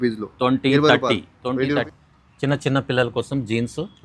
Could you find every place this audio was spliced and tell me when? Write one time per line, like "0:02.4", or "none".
0:01.9